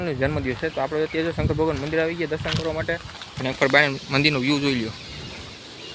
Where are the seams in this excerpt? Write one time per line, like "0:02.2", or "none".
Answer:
none